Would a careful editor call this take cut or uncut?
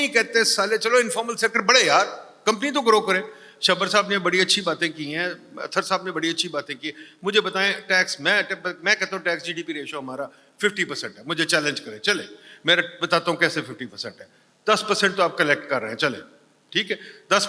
uncut